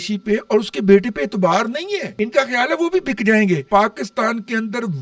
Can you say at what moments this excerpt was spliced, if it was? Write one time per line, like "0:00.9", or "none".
0:02.1
0:03.6